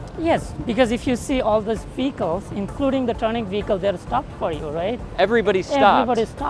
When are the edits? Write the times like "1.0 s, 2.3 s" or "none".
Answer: none